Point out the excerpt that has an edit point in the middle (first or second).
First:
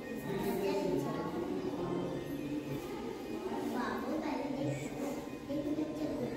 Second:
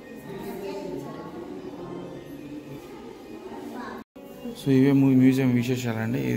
second